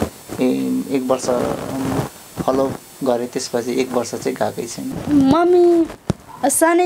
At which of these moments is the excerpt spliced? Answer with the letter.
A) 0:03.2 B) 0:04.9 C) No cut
B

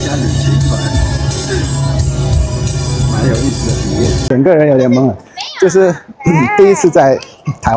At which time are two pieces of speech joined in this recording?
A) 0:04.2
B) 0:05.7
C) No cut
A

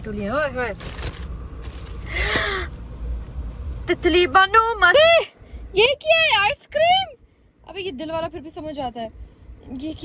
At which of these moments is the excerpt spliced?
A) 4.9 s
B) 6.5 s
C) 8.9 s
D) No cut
A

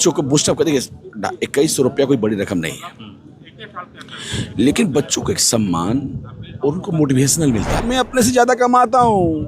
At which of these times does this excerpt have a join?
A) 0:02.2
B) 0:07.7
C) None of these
B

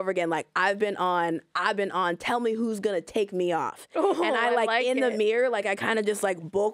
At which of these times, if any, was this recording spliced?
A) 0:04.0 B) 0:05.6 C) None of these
C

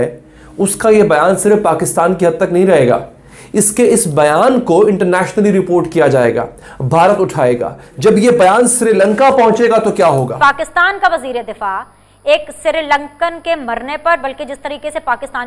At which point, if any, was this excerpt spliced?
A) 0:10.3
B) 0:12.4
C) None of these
A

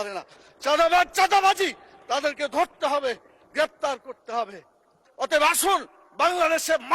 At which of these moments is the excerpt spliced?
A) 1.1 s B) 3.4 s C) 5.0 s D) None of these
C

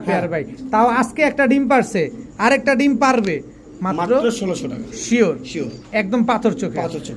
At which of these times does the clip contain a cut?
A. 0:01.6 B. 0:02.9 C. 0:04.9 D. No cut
D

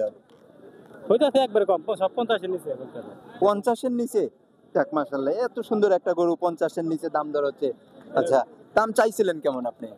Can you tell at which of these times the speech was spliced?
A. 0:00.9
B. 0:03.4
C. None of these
B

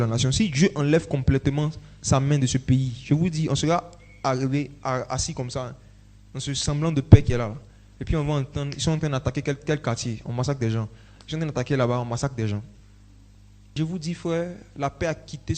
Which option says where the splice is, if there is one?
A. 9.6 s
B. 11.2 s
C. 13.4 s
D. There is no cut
C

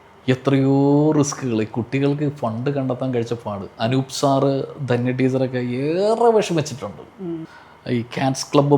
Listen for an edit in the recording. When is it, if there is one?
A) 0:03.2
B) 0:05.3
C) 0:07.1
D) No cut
C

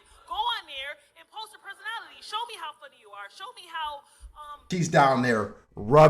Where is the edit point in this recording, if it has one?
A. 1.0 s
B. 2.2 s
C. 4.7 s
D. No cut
C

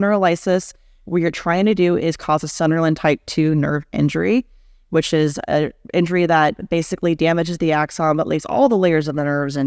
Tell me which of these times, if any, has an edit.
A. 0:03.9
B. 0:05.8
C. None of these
C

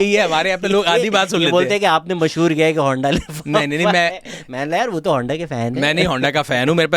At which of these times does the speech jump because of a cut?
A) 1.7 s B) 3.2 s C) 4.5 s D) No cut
D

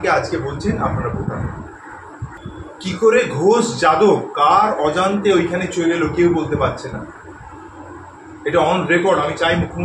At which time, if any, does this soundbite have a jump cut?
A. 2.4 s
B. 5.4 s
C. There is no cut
A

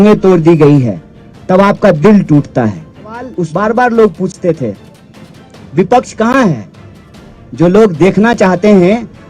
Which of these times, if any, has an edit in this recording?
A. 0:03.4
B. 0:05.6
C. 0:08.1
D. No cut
A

